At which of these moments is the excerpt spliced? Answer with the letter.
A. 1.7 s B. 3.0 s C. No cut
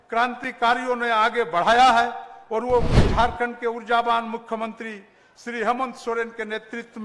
B